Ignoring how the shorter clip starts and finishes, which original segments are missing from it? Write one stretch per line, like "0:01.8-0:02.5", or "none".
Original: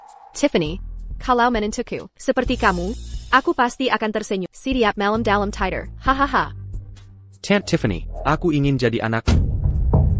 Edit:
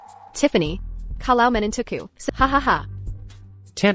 0:02.2-0:05.8